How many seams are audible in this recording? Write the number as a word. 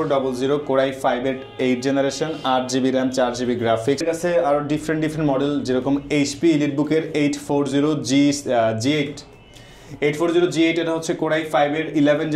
one